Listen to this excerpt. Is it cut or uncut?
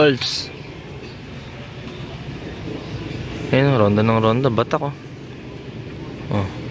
uncut